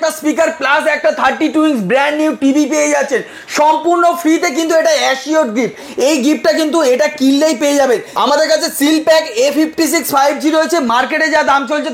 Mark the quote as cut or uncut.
uncut